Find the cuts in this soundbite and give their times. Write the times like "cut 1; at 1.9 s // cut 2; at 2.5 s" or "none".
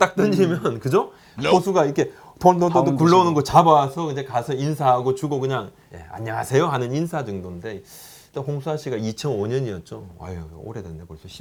none